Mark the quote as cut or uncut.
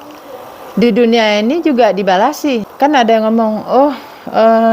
cut